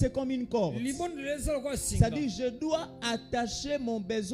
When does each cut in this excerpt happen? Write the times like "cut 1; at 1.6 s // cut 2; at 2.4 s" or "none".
none